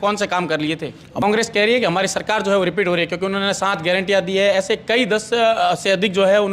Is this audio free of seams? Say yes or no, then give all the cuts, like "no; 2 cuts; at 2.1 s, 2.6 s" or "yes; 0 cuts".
no; 1 cut; at 1.2 s